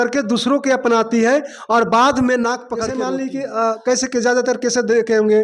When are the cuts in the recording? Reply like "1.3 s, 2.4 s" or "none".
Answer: 2.9 s